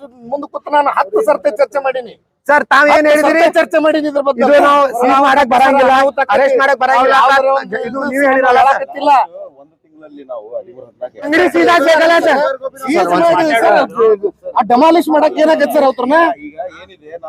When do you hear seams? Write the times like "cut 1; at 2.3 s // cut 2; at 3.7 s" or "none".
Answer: cut 1; at 11.3 s